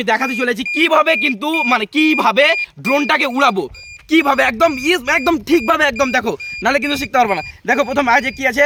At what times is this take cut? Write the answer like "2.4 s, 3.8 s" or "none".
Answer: none